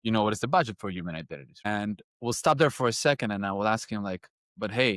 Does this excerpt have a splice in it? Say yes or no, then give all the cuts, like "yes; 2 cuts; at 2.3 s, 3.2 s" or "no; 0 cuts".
yes; 1 cut; at 1.5 s